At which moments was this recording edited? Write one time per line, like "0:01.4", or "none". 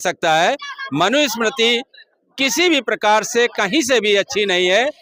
none

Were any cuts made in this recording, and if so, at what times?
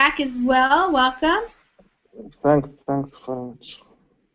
0:03.0

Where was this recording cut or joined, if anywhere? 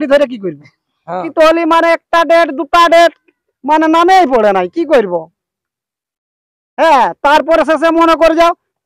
0:01.2

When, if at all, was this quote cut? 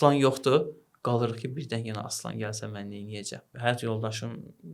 0:03.5

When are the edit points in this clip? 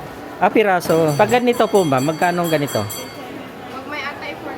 0:01.1

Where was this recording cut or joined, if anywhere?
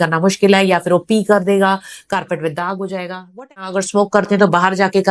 0:03.7

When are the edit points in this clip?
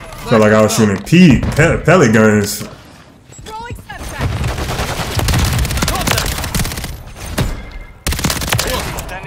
none

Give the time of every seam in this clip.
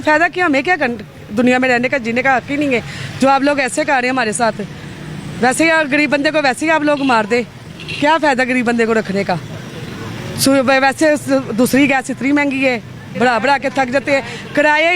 none

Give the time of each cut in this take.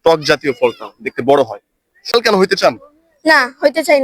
0:02.1

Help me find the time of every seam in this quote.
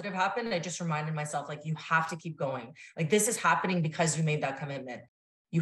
none

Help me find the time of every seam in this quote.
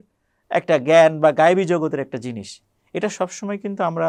none

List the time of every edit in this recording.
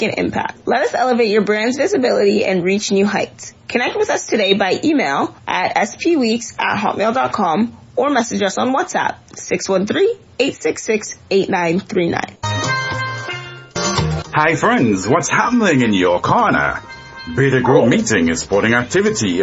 none

